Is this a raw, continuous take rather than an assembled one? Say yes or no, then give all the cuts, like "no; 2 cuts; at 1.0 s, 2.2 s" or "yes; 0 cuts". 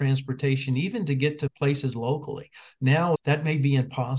no; 2 cuts; at 1.5 s, 3.2 s